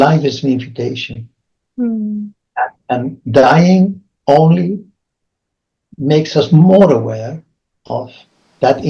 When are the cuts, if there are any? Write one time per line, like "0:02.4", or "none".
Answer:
none